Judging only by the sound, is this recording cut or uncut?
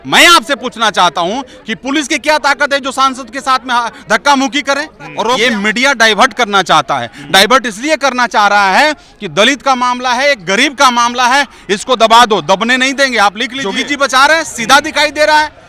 cut